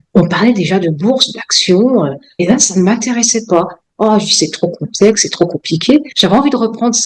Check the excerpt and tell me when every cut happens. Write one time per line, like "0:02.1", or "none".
0:02.4
0:06.1